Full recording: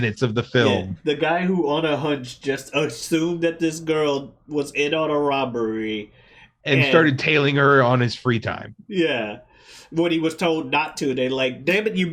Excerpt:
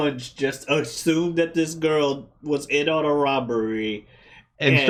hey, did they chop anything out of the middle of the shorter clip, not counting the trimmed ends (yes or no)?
no